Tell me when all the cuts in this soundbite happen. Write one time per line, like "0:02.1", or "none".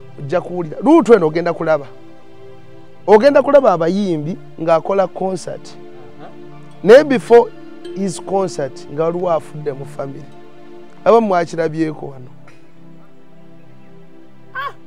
none